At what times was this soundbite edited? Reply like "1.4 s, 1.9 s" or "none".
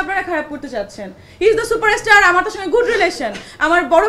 none